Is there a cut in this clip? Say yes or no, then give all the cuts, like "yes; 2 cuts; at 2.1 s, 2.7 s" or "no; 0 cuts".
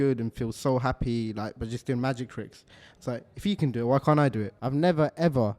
yes; 1 cut; at 4.5 s